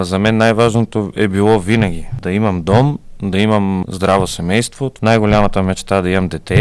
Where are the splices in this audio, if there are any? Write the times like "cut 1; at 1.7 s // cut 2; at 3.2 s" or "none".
cut 1; at 2.2 s // cut 2; at 3.8 s // cut 3; at 4.8 s